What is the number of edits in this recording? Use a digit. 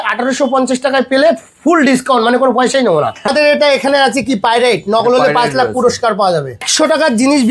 2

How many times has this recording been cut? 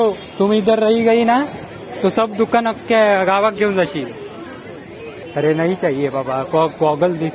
1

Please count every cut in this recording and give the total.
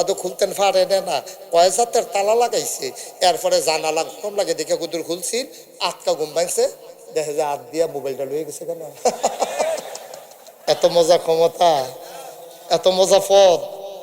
1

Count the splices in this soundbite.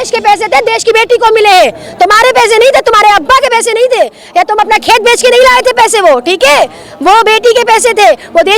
0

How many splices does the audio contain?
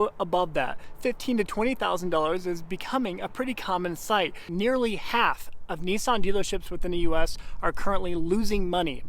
1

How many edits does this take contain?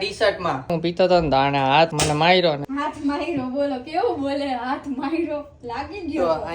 3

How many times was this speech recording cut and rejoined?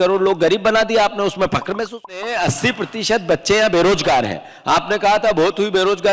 1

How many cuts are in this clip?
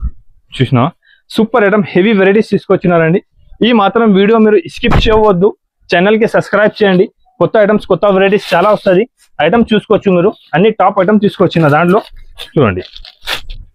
0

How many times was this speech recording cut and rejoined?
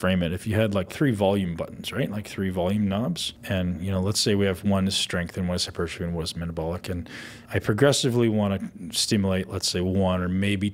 3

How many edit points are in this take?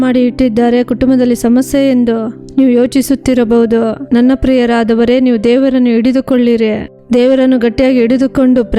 1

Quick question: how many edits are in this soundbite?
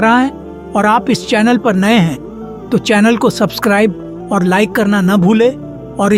0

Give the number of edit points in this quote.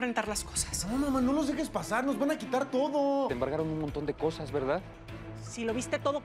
1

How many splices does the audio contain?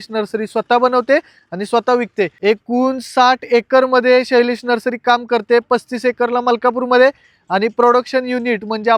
0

